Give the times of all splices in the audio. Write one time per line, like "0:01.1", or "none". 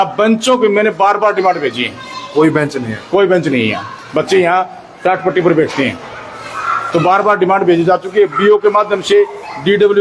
none